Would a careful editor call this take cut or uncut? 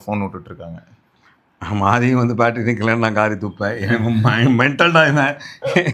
uncut